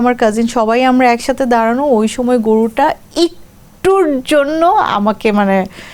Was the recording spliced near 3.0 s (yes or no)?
no